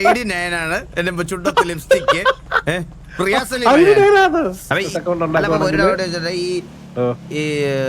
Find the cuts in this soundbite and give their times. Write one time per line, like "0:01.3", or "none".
0:04.6

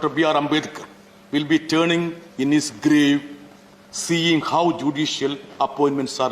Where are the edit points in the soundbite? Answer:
none

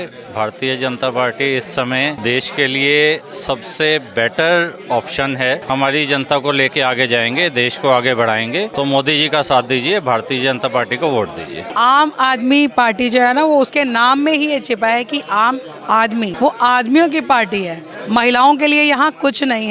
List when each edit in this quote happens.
0:02.2
0:05.6
0:08.7
0:11.6
0:16.3

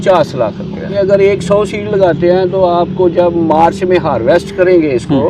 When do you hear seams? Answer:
0:00.9

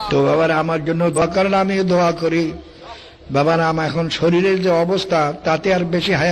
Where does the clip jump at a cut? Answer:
0:01.2

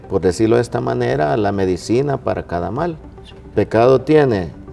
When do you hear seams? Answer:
0:03.5

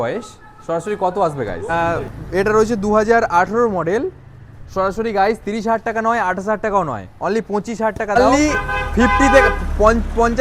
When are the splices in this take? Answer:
0:01.6
0:08.2

